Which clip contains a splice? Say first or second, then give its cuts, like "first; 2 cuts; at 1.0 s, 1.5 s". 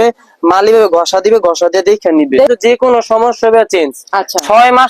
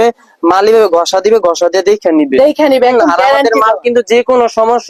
first; 1 cut; at 2.5 s